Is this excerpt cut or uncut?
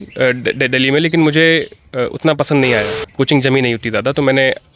cut